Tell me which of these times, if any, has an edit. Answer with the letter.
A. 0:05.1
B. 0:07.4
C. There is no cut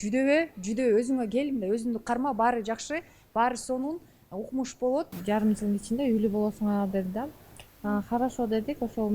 A